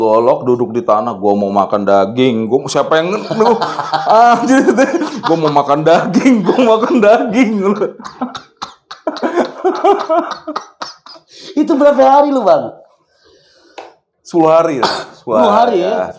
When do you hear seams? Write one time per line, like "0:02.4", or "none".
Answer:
none